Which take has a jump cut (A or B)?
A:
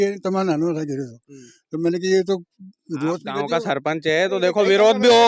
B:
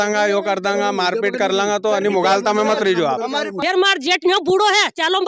B